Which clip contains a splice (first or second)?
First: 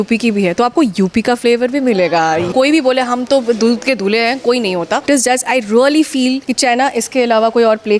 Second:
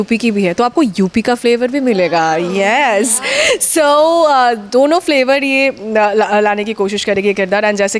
first